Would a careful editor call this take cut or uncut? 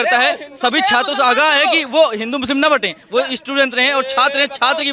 uncut